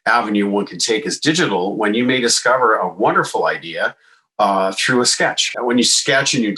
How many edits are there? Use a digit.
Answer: 1